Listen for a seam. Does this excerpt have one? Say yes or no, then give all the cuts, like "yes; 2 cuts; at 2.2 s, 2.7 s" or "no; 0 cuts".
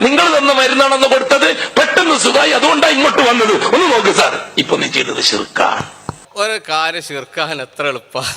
yes; 1 cut; at 6.2 s